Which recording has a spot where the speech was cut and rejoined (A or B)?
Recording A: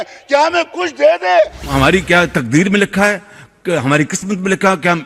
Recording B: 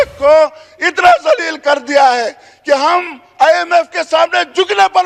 A